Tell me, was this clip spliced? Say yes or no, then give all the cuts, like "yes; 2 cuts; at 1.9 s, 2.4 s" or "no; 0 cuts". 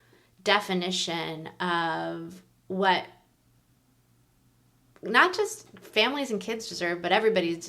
no; 0 cuts